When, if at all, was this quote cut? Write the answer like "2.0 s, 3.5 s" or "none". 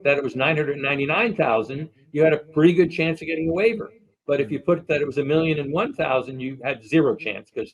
none